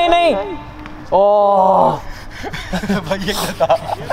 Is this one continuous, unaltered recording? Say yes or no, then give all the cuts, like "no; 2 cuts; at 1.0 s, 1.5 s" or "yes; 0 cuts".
yes; 0 cuts